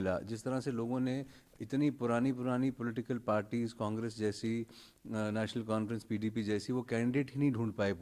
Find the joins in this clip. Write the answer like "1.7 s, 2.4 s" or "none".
none